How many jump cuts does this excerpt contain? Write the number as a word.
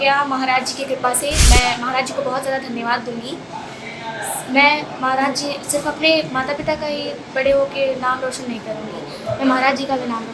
one